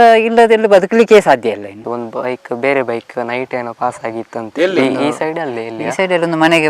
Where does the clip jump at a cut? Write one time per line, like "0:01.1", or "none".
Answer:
0:01.7